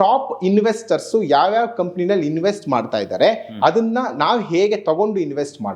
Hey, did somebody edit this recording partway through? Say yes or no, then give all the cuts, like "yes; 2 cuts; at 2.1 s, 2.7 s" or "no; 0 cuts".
no; 0 cuts